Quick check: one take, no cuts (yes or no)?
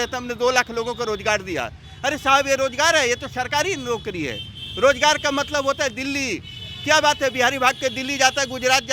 yes